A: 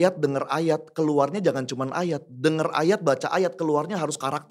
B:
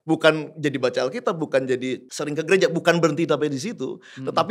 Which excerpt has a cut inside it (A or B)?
B